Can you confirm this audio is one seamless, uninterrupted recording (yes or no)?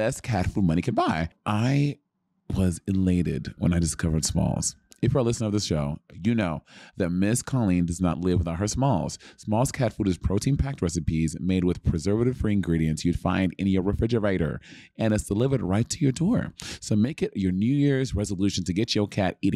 no